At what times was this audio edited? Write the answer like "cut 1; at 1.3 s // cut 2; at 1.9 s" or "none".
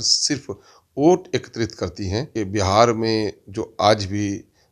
cut 1; at 2.3 s